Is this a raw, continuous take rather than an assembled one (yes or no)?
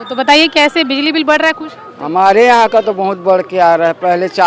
yes